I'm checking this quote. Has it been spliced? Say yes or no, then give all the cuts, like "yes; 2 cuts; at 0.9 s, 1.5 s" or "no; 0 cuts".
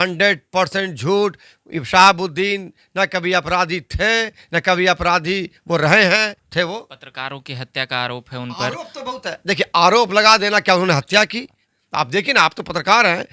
yes; 2 cuts; at 6.4 s, 11.6 s